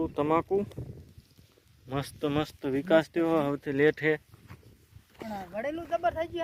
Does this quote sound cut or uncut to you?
uncut